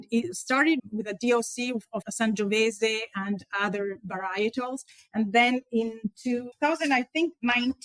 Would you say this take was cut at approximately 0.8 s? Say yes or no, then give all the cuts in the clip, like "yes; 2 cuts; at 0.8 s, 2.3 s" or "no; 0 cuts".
yes; 3 cuts; at 0.8 s, 2.1 s, 6.5 s